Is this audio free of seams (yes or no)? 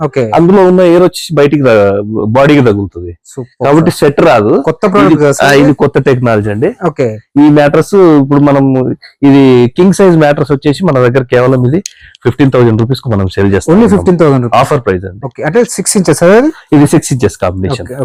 yes